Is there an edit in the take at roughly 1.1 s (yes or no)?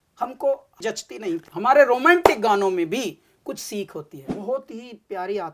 yes